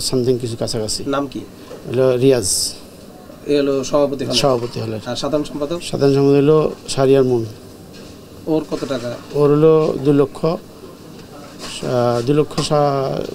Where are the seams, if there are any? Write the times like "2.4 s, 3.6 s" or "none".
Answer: none